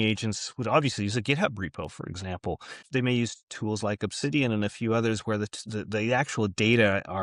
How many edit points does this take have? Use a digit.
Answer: 1